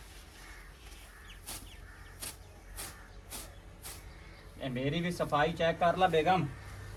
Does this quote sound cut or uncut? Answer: uncut